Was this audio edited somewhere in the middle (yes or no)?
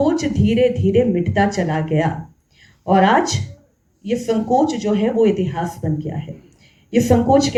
no